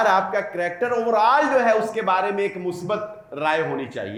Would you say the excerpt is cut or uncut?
uncut